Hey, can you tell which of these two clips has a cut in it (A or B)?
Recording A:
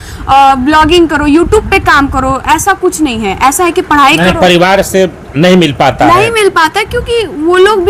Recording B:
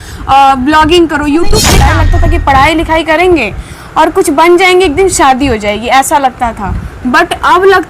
B